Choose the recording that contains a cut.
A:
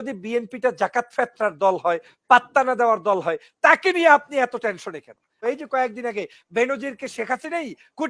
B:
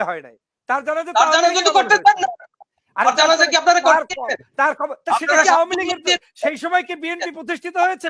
A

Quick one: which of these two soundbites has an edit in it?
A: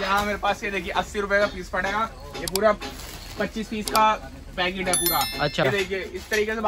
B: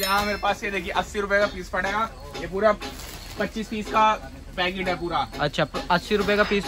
A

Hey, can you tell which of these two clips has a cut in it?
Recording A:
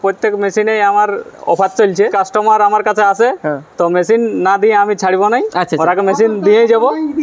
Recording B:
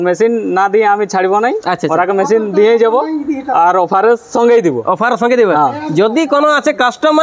A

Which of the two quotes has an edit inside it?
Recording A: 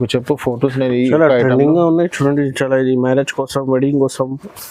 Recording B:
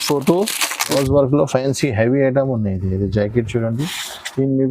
B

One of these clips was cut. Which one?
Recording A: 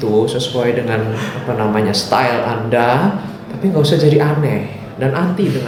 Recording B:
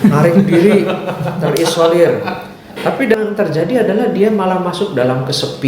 B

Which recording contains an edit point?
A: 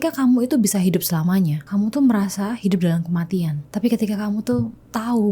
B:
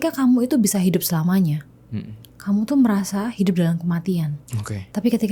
A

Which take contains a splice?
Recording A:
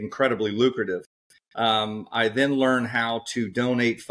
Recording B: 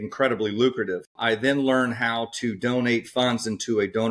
B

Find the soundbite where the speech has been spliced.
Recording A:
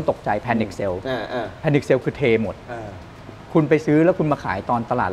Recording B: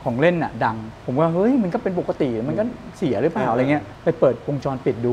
B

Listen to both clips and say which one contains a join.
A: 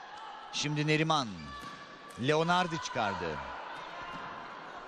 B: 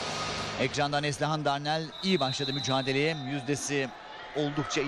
B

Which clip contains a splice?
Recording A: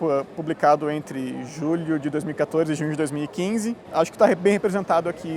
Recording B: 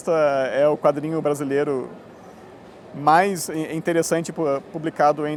A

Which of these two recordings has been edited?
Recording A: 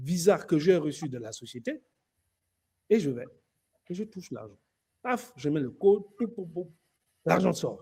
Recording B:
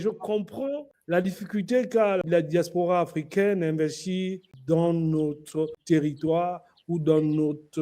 B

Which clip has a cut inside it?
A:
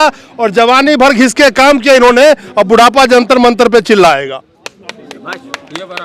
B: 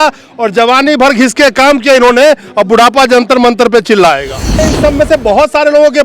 B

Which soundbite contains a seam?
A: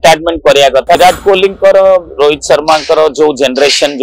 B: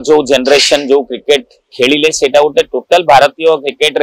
A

